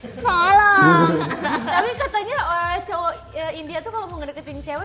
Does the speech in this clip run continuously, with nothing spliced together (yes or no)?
no